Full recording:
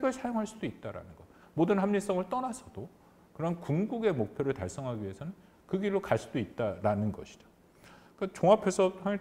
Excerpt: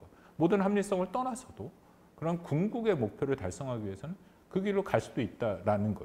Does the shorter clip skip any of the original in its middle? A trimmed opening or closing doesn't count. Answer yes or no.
no